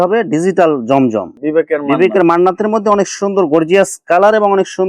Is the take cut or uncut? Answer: cut